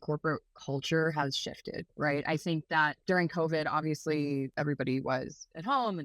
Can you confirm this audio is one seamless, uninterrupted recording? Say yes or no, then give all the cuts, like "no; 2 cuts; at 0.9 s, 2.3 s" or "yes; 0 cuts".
no; 2 cuts; at 3.0 s, 4.5 s